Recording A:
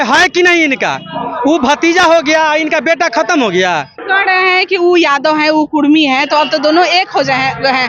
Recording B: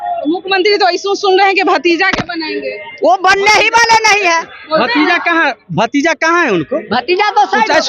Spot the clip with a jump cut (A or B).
A